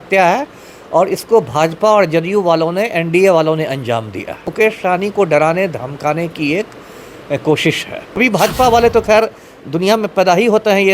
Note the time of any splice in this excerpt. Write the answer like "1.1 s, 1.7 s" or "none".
4.5 s, 8.2 s

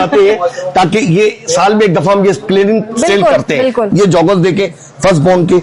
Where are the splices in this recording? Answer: 3.9 s

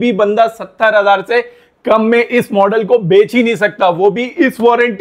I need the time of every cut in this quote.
none

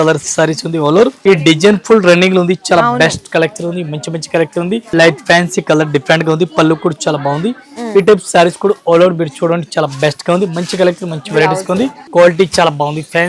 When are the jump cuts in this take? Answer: 1.2 s, 4.9 s, 12.0 s

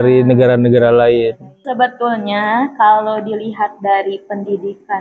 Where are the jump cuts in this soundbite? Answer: 1.5 s

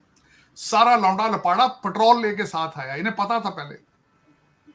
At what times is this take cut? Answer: none

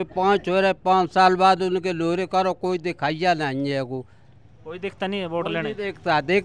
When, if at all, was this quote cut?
none

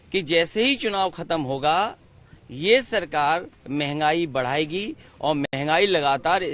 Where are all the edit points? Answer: none

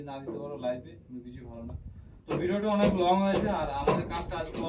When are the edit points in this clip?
none

